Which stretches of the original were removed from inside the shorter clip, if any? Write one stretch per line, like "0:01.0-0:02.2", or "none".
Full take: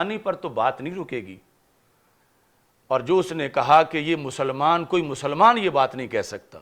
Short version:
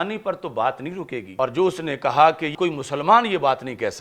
0:01.3-0:02.8
0:04.0-0:04.8